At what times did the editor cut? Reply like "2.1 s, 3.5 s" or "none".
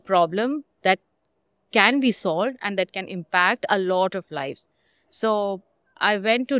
none

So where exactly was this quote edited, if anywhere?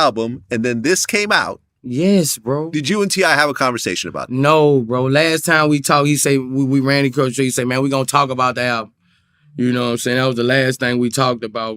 1.3 s

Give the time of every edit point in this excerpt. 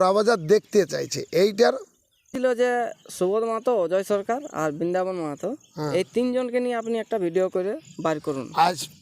2.3 s

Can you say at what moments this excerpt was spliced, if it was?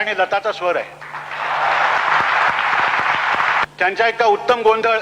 2.0 s, 3.6 s

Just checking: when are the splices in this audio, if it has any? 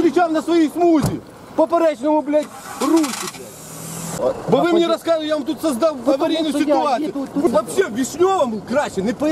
4.2 s, 7.5 s

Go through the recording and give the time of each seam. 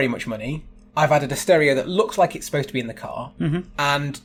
none

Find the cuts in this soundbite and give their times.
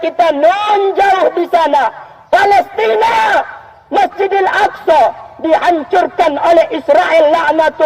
none

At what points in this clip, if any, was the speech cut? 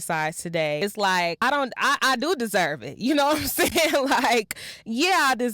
1.0 s

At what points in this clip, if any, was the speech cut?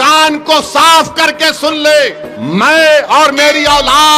2.3 s

